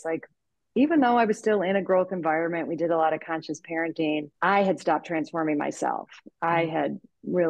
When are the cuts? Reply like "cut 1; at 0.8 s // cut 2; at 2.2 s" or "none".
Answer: cut 1; at 4.3 s